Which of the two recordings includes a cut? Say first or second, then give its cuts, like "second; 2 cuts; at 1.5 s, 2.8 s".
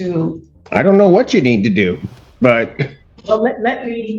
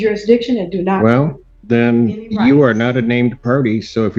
first; 1 cut; at 3.1 s